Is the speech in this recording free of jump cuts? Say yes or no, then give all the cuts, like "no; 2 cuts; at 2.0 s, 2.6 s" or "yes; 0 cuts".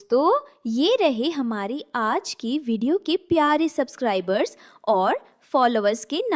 yes; 0 cuts